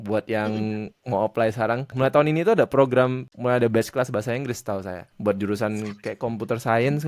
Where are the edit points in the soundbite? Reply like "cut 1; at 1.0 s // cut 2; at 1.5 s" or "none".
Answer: cut 1; at 1.9 s // cut 2; at 3.3 s // cut 3; at 5.0 s